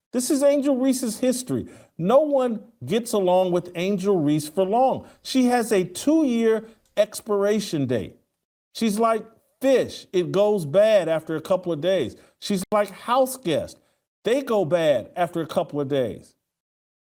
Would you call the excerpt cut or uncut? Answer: uncut